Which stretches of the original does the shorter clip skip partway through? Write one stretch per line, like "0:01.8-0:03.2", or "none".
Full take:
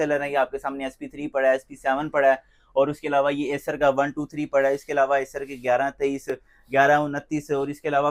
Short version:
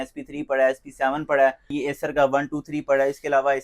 0:02.6-0:03.4